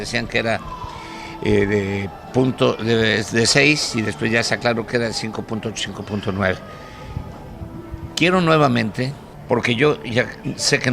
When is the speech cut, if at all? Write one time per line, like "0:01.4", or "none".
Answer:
0:03.9